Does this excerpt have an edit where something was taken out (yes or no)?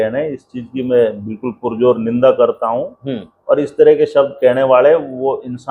no